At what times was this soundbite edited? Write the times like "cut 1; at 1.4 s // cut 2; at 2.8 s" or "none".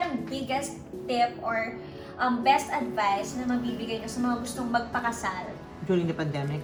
none